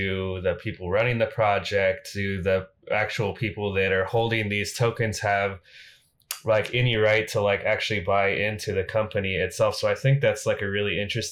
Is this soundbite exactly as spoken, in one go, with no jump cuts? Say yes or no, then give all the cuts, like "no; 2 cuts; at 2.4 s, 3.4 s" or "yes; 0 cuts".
yes; 0 cuts